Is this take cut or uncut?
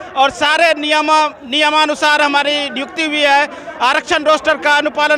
uncut